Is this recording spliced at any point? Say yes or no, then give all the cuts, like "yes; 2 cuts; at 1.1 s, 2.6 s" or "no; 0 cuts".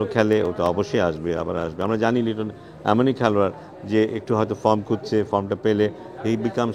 no; 0 cuts